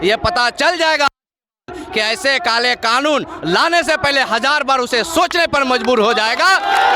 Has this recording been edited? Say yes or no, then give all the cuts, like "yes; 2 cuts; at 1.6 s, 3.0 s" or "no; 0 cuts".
no; 0 cuts